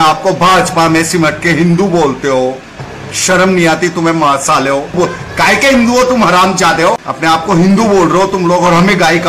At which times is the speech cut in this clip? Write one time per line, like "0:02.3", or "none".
0:04.9
0:07.1